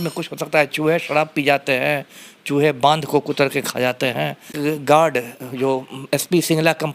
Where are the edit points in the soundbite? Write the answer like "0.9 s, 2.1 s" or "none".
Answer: 4.5 s